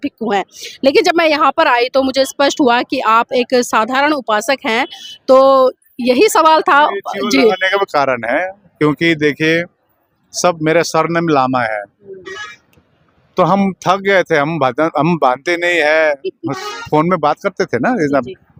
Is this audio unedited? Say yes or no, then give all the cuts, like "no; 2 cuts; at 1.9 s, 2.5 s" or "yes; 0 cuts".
yes; 0 cuts